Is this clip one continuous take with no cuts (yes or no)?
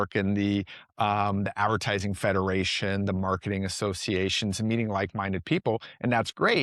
yes